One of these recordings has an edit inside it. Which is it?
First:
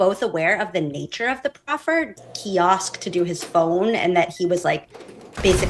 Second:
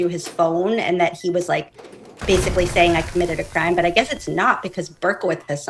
first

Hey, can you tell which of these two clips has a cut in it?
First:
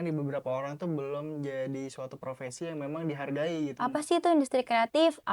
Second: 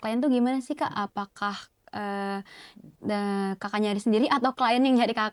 first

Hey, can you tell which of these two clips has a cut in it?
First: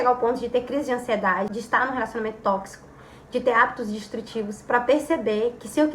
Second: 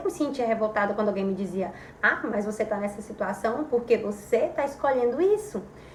first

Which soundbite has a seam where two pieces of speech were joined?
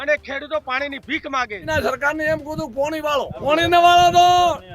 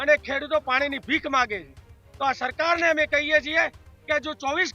first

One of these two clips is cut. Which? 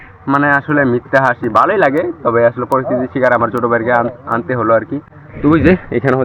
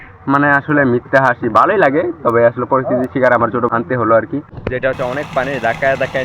second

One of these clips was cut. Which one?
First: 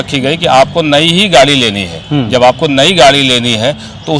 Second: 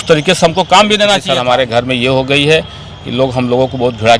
second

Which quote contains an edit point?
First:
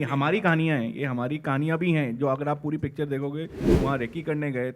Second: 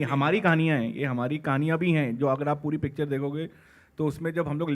first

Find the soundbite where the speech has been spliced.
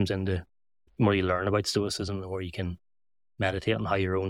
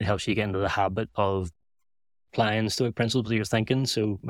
first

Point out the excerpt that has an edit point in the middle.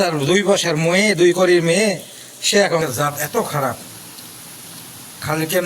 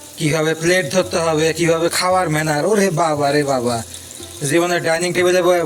first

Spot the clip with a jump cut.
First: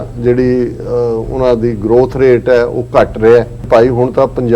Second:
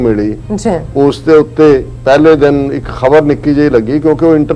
first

